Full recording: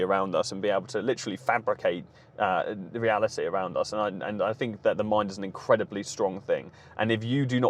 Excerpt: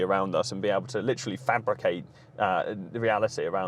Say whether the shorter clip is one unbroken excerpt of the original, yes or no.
yes